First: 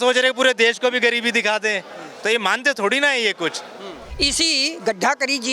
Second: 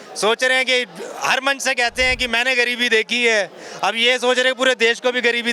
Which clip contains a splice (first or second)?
first